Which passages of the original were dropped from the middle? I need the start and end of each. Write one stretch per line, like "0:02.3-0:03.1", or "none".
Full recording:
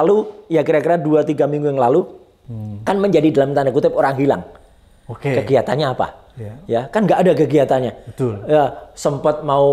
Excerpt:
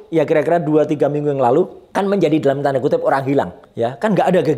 0:02.2-0:02.7
0:04.5-0:06.5